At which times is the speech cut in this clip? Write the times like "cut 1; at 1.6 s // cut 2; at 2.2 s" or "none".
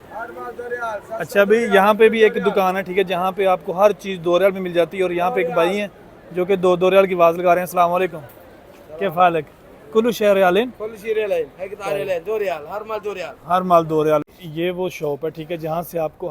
cut 1; at 14.3 s